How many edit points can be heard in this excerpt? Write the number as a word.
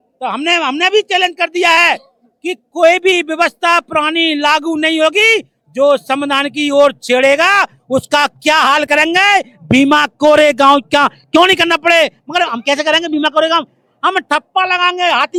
zero